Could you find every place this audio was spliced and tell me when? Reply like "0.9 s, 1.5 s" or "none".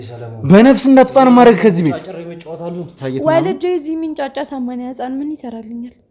3.0 s